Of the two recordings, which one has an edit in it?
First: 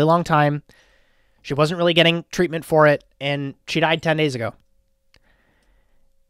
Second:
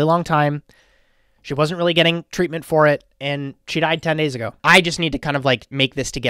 second; 1 cut; at 4.5 s

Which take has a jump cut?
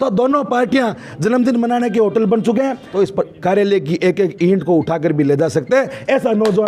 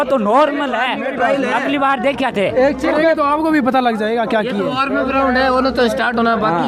first; 1 cut; at 2.8 s

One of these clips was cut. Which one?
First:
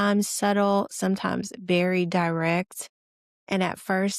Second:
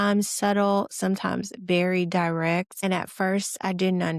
second; 1 cut; at 2.7 s

